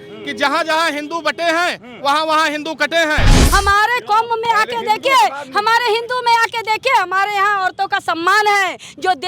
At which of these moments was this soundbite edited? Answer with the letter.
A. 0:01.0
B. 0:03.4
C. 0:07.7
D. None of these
B